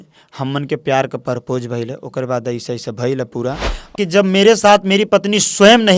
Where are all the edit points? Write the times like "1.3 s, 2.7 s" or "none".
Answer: 4.0 s